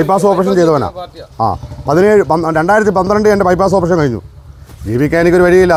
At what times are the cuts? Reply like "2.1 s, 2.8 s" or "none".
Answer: none